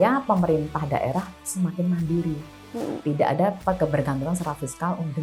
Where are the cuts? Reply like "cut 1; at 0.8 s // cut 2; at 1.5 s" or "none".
none